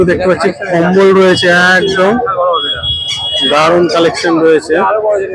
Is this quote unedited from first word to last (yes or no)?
yes